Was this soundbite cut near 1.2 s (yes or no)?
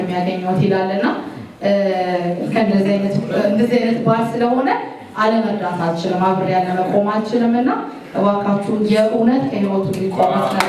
no